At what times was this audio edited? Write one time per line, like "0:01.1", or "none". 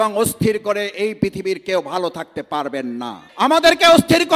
0:03.2